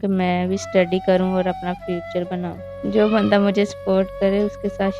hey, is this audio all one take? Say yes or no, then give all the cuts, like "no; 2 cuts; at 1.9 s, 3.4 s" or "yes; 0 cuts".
no; 1 cut; at 2.8 s